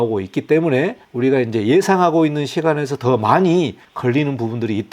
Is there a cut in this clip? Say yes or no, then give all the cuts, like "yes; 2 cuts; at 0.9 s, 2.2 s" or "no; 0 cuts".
yes; 2 cuts; at 1.0 s, 3.8 s